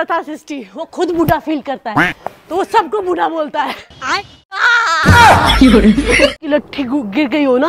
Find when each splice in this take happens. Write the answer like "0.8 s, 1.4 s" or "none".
4.7 s, 6.4 s